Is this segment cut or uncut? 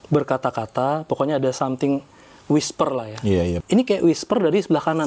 cut